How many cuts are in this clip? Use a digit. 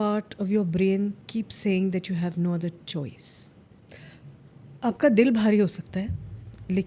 2